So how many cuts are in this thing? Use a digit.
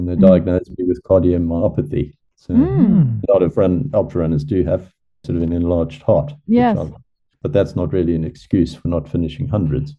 1